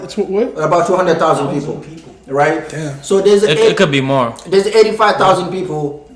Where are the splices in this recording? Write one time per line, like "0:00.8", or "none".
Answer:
none